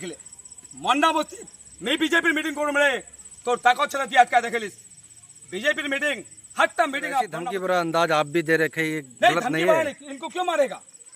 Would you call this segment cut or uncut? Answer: cut